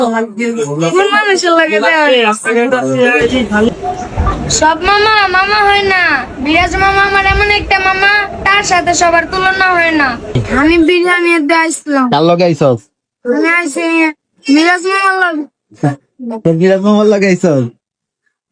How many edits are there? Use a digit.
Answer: 2